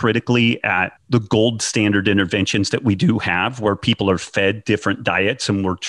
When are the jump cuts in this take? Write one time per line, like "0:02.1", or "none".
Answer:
0:00.9